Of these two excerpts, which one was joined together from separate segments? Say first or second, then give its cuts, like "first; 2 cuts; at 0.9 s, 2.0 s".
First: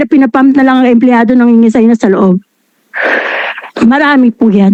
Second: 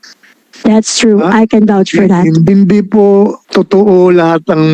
second; 2 cuts; at 2.4 s, 3.4 s